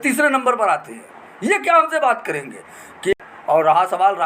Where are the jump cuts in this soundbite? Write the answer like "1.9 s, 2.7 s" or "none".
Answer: 3.1 s